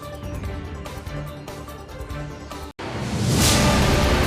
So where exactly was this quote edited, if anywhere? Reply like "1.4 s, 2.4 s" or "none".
1.3 s